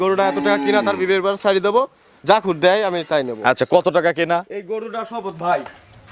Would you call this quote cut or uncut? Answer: uncut